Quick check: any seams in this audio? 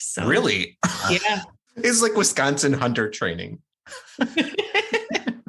yes; 1 cut; at 1.6 s

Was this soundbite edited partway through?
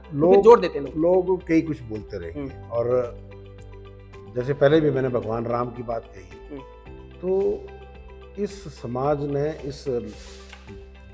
no; 0 cuts

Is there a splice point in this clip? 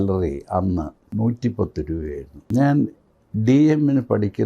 yes; 2 cuts; at 1.0 s, 2.3 s

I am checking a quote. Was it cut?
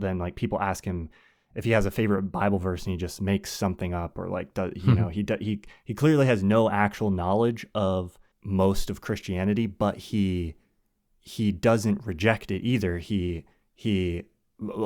yes; 1 cut; at 8.3 s

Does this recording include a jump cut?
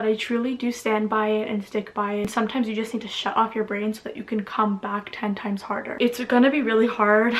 yes; 2 cuts; at 2.3 s, 6.0 s

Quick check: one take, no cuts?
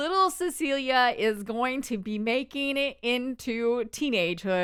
yes; 0 cuts

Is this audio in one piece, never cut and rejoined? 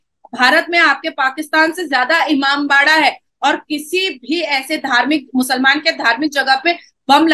yes; 0 cuts

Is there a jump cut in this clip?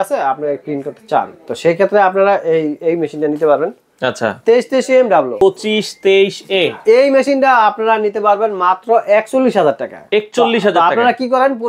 yes; 1 cut; at 5.3 s

